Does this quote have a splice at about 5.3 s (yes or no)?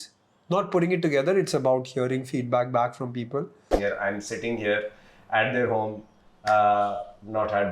no